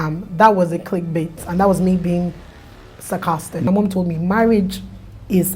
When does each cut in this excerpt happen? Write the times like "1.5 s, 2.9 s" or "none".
3.7 s